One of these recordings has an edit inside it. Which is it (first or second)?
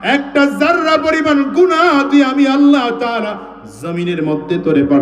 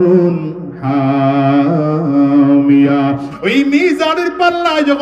second